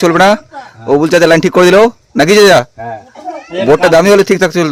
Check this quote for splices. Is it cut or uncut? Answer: uncut